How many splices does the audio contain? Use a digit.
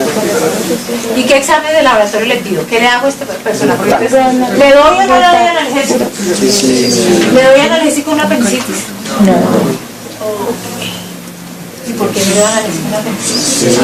0